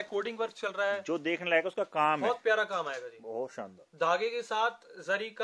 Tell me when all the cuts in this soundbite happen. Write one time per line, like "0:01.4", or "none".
none